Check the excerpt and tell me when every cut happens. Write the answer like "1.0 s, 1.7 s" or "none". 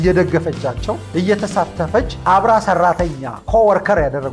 1.0 s, 2.1 s